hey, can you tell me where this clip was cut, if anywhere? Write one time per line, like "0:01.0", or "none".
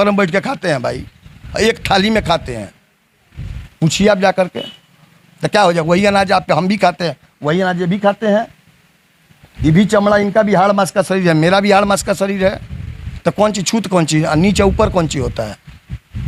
none